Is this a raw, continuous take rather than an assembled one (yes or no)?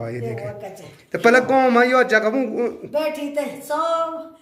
yes